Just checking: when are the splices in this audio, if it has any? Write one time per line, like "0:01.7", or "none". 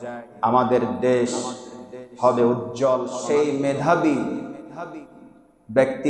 0:03.1